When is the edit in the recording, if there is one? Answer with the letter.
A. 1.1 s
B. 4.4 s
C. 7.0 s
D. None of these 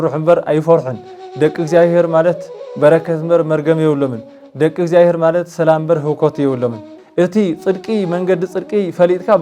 C